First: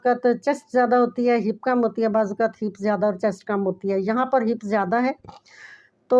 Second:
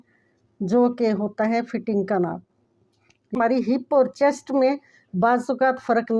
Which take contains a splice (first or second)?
second